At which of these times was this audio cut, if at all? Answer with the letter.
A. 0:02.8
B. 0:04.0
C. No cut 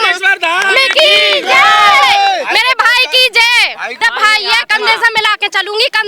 B